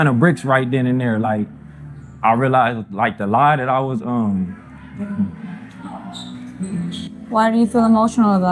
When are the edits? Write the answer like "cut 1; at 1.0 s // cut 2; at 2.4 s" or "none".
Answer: none